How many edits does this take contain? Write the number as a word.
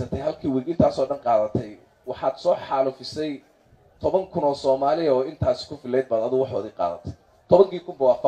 zero